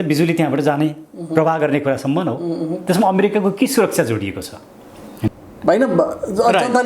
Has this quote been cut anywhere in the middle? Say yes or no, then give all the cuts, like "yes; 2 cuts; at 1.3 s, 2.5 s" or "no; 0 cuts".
yes; 1 cut; at 5.3 s